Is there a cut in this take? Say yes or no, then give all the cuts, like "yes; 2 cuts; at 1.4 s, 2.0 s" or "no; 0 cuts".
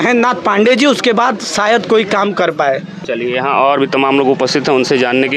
no; 0 cuts